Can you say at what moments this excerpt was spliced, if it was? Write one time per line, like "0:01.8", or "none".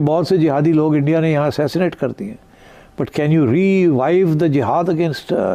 none